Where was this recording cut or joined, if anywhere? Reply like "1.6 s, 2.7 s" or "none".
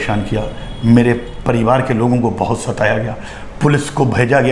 none